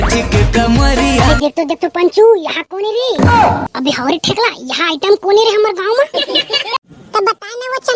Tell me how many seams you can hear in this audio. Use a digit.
2